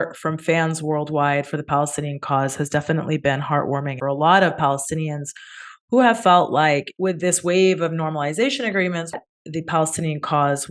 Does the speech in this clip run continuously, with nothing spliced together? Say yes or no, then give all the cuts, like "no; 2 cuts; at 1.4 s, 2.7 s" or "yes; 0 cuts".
no; 2 cuts; at 3.9 s, 9.2 s